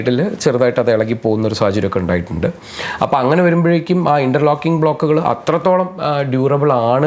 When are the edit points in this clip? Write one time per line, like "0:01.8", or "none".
none

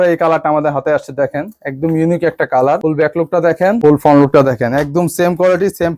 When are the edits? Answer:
none

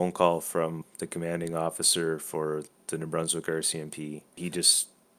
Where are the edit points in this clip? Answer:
0:02.8
0:04.3

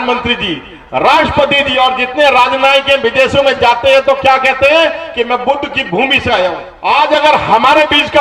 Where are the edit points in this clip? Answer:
0:06.7

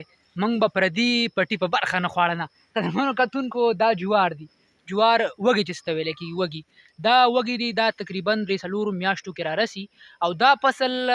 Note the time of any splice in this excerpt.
none

